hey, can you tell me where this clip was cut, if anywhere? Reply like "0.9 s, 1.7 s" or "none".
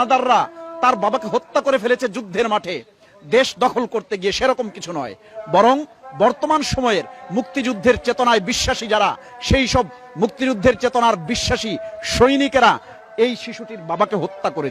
none